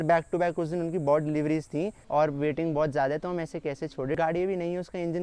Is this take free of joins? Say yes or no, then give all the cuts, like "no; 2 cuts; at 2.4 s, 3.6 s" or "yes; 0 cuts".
no; 2 cuts; at 2.0 s, 4.2 s